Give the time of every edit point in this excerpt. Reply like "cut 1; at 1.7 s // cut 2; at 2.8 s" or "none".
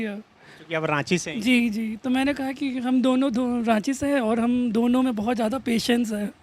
none